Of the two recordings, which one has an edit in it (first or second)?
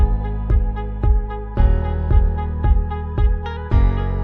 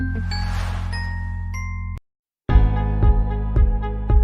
second